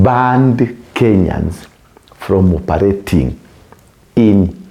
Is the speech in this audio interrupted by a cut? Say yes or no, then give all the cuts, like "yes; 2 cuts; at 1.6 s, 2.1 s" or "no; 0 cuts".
no; 0 cuts